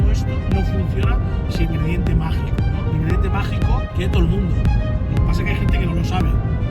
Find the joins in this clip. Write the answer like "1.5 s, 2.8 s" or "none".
1.7 s, 3.9 s